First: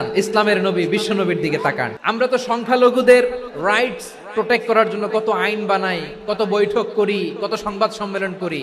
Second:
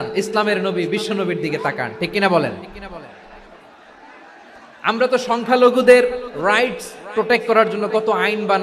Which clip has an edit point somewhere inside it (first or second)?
first